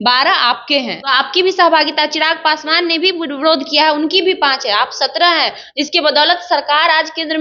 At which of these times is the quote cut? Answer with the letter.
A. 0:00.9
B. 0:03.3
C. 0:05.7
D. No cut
A